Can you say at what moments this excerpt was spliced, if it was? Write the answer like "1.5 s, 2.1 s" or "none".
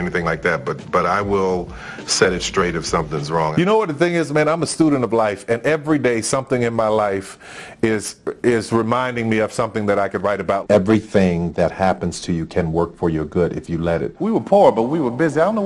3.5 s, 10.6 s, 14.1 s